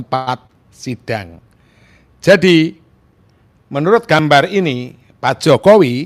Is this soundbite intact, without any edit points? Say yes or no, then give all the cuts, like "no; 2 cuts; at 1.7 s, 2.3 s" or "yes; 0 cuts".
yes; 0 cuts